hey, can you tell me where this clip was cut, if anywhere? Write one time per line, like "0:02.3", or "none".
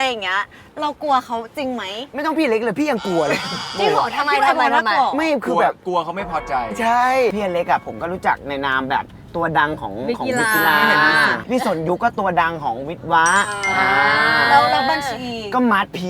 0:07.3
0:11.4